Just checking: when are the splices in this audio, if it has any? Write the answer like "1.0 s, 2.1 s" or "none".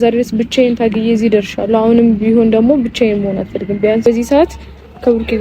4.1 s